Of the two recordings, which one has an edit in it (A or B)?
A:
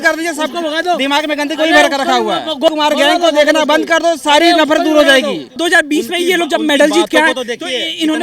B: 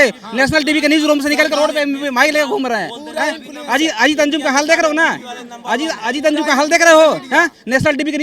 A